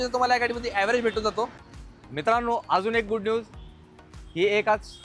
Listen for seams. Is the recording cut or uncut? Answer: cut